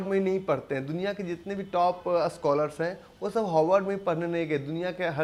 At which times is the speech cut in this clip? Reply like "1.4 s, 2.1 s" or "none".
none